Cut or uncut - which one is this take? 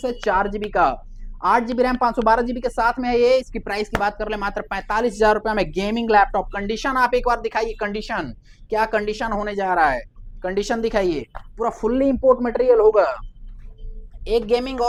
uncut